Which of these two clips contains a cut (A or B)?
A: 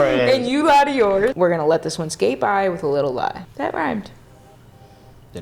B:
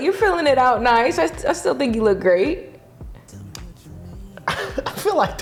A